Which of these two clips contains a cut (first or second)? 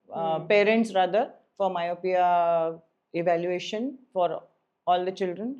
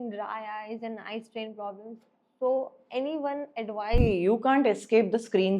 second